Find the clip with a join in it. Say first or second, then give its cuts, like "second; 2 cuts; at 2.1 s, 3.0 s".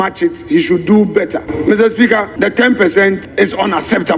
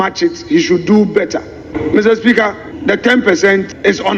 first; 2 cuts; at 1.4 s, 2.3 s